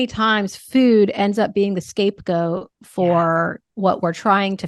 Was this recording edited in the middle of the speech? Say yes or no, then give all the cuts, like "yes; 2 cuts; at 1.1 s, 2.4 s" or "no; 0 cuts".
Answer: no; 0 cuts